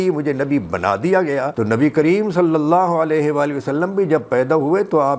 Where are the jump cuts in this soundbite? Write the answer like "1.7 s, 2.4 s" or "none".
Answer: 1.5 s